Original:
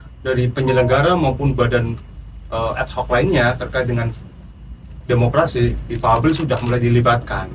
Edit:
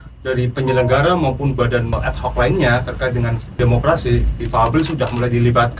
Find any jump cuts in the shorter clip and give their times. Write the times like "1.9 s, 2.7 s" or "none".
2.0 s, 3.4 s